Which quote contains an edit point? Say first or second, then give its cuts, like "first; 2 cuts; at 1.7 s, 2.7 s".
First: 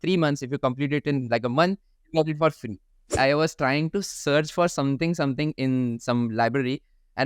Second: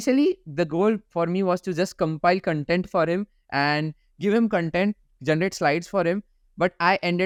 first; 1 cut; at 3.1 s